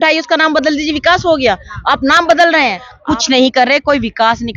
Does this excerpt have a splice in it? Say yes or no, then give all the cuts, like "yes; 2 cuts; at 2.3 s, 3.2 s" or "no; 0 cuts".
yes; 1 cut; at 2.9 s